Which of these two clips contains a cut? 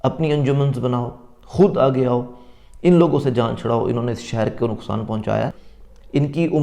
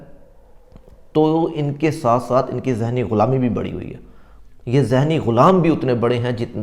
first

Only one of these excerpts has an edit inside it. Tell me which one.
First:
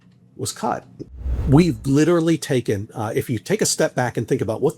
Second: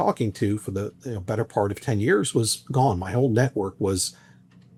first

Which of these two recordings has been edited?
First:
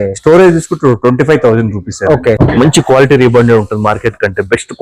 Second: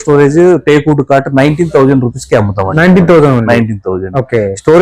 first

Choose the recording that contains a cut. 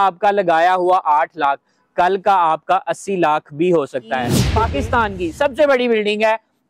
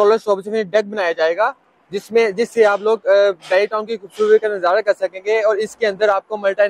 first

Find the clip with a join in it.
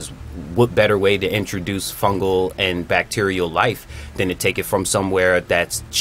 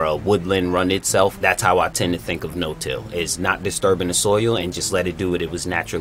second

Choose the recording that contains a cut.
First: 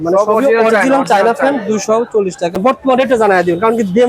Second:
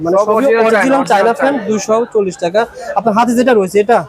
first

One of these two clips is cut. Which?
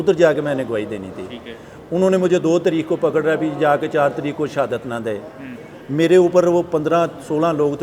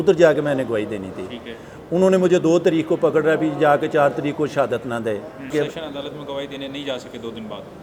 second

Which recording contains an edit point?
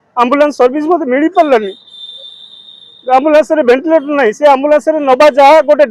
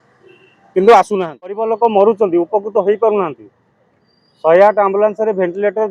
second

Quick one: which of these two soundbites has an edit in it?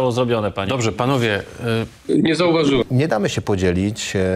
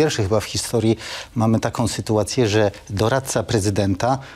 first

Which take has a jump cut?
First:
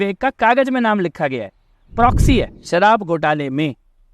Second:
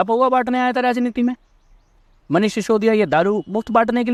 first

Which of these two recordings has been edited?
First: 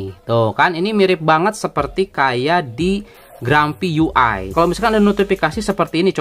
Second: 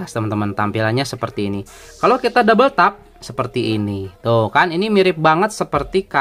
first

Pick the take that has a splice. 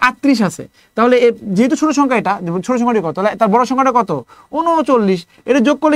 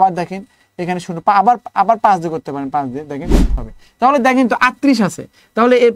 second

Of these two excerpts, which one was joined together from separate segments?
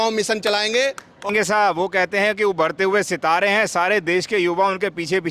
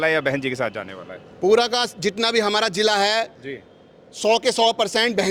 first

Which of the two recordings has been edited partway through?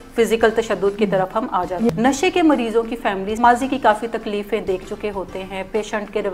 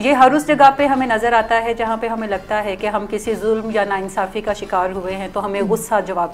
first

